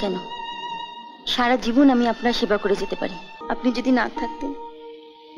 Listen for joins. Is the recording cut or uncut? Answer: cut